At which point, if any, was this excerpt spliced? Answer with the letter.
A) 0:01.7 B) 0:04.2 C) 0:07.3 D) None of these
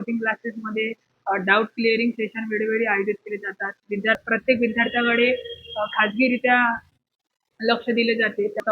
B